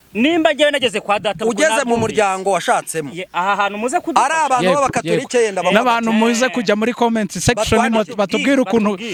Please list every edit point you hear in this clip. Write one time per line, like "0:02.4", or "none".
none